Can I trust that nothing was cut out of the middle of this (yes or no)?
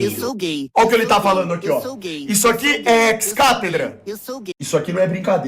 no